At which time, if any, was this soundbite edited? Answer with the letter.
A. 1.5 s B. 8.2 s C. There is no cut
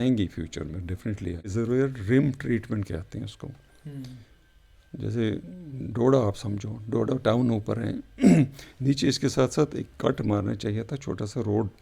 A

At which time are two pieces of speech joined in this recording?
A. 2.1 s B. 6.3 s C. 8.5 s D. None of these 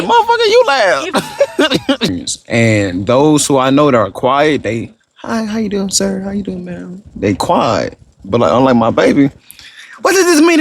A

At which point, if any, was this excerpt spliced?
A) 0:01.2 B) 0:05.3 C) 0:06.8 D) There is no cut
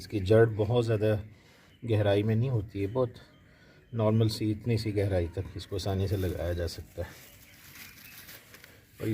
D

